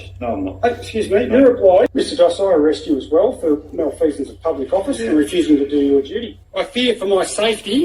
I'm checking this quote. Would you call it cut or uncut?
cut